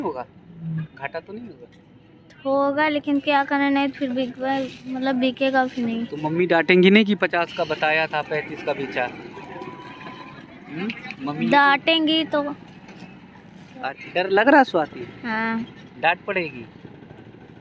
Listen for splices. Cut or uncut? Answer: cut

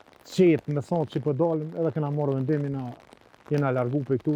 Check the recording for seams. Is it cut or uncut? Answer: uncut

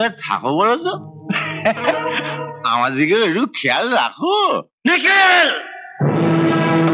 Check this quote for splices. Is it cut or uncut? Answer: cut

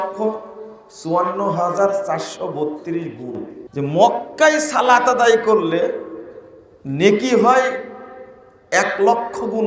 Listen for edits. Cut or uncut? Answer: cut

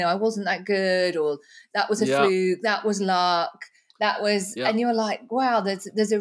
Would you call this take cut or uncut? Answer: uncut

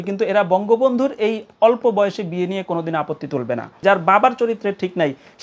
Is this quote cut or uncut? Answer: cut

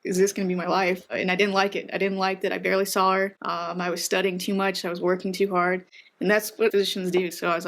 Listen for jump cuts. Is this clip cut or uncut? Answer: cut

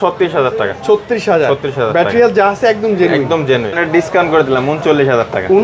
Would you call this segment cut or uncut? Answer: cut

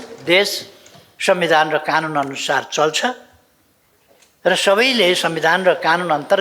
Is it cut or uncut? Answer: uncut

